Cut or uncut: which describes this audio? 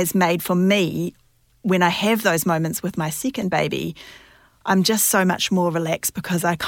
uncut